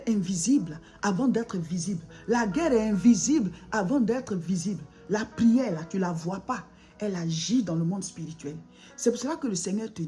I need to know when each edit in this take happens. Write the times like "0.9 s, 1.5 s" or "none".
none